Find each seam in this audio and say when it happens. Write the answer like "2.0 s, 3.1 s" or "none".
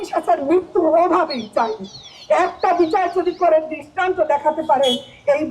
none